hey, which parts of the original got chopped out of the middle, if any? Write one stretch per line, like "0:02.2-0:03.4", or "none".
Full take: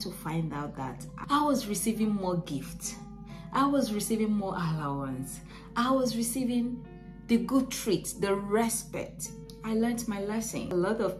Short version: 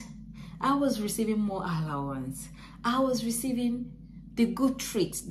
none